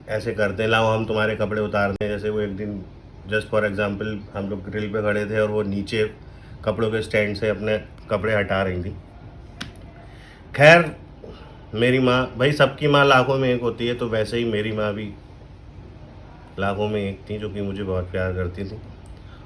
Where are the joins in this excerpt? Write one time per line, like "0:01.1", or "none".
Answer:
none

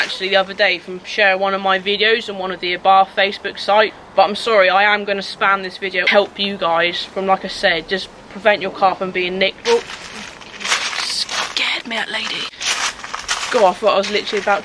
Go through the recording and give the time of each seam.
0:04.0
0:06.0
0:09.6
0:12.5

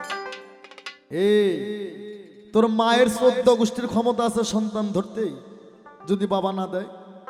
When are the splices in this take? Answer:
none

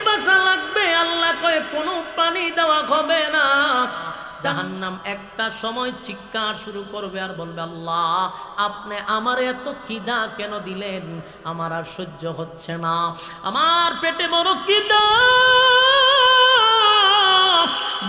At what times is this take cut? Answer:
0:04.2

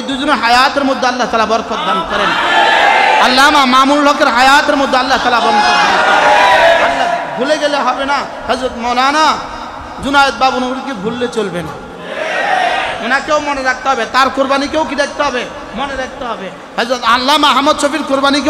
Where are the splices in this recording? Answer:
none

